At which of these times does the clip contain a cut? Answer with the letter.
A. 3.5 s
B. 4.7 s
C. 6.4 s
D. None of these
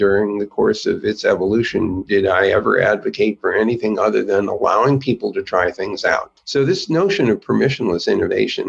C